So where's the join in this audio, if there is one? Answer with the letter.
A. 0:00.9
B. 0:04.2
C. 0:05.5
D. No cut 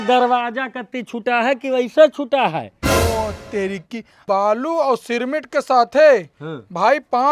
B